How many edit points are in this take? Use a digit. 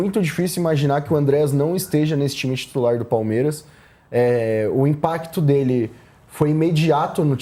0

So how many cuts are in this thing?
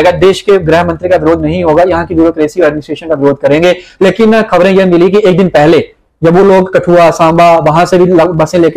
0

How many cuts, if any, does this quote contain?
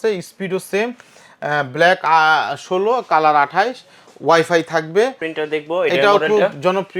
1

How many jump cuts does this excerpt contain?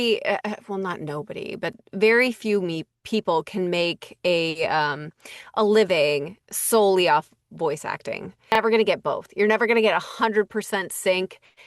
1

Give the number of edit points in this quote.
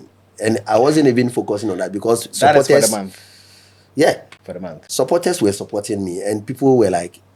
0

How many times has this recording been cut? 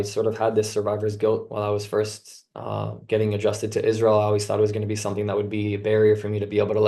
0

